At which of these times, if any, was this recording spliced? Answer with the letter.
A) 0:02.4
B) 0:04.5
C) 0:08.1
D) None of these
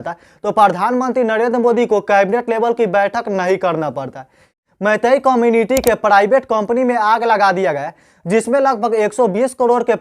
B